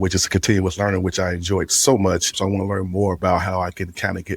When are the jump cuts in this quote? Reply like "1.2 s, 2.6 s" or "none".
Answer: 2.3 s